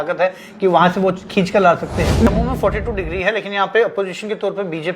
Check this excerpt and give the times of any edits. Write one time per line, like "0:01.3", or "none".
0:02.3